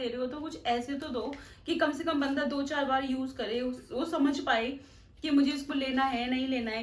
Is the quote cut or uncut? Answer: uncut